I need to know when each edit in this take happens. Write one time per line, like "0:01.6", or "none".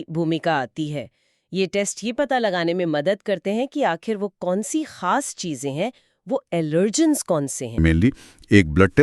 0:07.8